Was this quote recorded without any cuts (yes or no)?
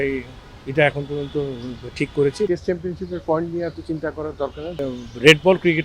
no